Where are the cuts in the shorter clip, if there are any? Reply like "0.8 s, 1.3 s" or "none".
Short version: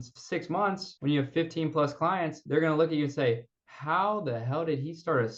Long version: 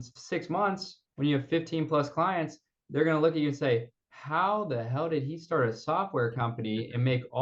0.9 s, 2.4 s